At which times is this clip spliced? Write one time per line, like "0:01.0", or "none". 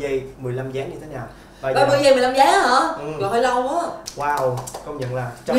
0:04.0

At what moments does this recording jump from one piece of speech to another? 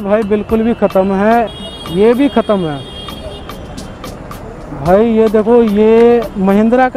0:01.5

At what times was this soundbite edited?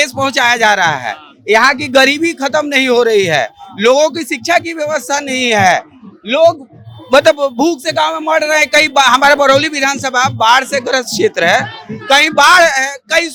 none

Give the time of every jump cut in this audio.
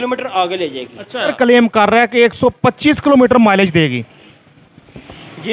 0:01.3

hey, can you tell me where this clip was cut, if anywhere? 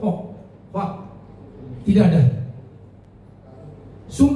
none

